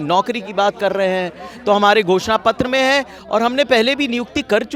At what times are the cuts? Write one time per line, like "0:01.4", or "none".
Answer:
none